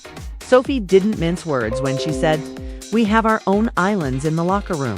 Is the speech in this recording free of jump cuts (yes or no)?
yes